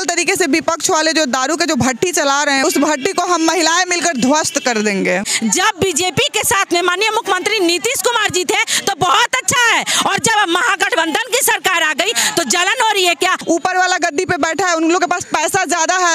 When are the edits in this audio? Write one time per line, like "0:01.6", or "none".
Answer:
0:02.6
0:05.3
0:13.4

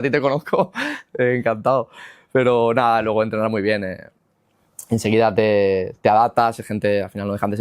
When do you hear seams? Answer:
none

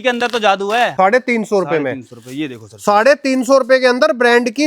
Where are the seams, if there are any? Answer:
0:00.9

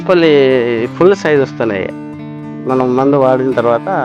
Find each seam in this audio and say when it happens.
none

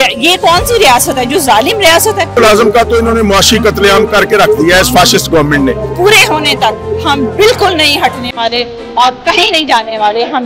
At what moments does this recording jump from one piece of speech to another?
0:02.4
0:05.9

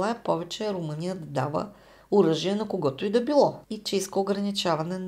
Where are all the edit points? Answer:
0:03.7

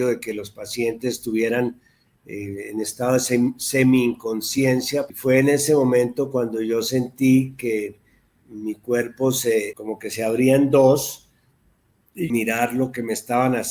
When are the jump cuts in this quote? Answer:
0:05.1
0:09.8
0:12.3

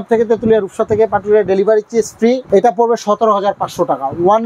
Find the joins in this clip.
0:02.4

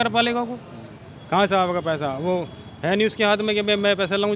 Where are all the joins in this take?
none

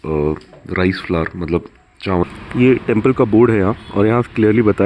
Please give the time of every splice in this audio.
0:02.2

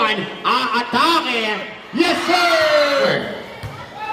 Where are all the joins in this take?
0:03.1

